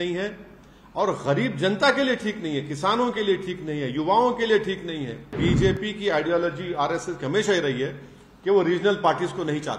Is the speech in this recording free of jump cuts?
no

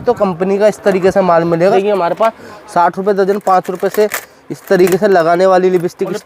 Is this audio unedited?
no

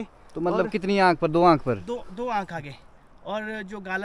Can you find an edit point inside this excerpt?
no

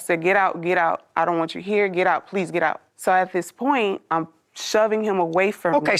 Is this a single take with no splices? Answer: yes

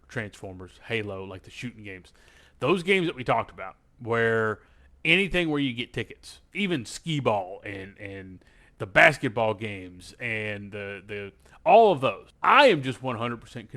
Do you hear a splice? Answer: yes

